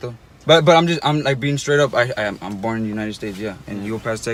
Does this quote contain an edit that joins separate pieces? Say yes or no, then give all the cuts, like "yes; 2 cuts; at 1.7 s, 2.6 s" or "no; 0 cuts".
no; 0 cuts